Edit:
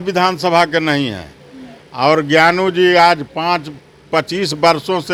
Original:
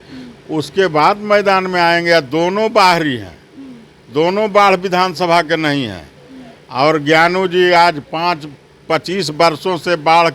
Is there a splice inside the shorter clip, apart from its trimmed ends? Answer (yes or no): no